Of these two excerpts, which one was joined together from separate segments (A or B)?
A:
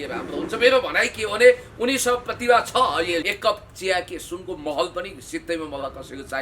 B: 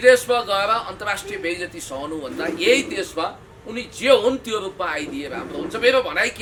A